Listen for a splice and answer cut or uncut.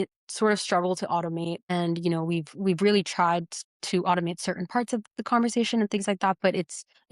cut